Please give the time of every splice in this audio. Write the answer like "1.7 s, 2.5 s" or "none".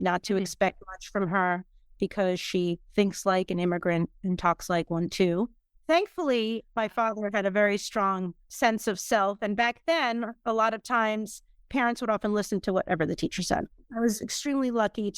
6.6 s, 8.4 s, 13.8 s